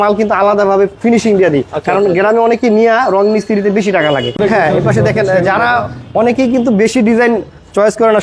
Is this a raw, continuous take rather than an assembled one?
no; 1 cut; at 4.4 s

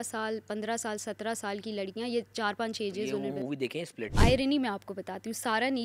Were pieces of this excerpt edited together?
yes; 1 cut; at 4.0 s

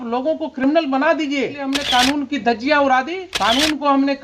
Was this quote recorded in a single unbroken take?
no; 2 cuts; at 1.7 s, 3.2 s

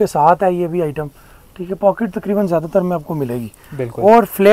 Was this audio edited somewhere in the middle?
no; 0 cuts

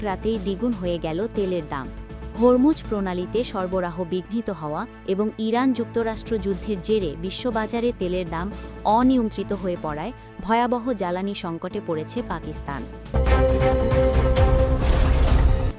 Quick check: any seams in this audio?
yes; 1 cut; at 13.1 s

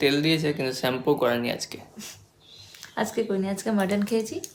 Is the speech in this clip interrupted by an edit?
no; 0 cuts

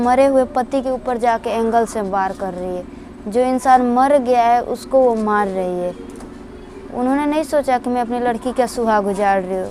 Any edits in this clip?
no; 0 cuts

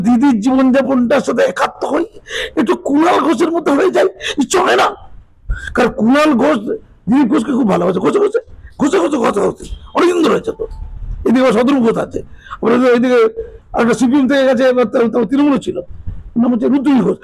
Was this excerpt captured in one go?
yes; 0 cuts

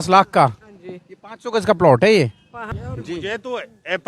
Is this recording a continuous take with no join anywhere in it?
no; 1 cut; at 2.7 s

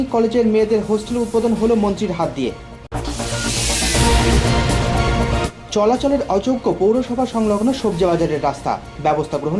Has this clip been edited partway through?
no; 0 cuts

